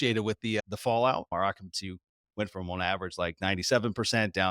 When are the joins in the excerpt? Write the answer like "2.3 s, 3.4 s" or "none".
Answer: 1.3 s